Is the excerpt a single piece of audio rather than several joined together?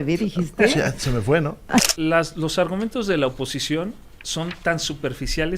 no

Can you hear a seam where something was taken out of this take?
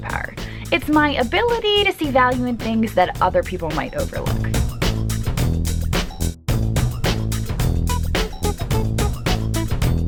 no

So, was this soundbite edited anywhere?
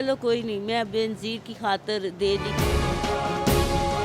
yes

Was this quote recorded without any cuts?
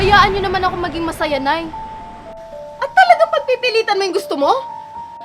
yes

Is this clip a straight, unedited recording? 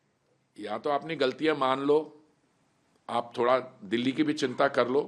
yes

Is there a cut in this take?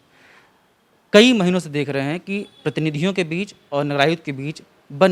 no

